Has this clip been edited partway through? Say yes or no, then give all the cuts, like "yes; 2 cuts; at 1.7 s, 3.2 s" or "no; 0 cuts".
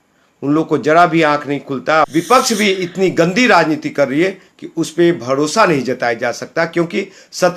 yes; 1 cut; at 2.0 s